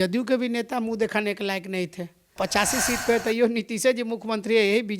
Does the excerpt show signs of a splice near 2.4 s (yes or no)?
yes